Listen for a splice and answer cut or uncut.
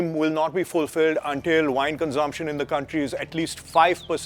uncut